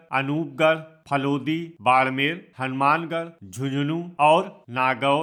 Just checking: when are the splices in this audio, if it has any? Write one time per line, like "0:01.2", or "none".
none